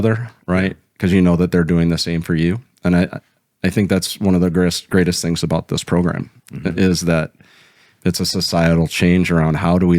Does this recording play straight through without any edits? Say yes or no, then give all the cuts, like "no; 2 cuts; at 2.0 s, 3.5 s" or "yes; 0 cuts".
no; 1 cut; at 7.9 s